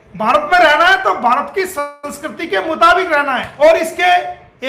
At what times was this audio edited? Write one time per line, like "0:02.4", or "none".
0:03.5